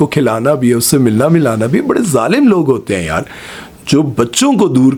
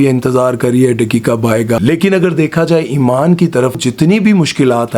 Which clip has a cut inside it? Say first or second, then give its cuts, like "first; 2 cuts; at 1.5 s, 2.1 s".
second; 2 cuts; at 1.8 s, 3.9 s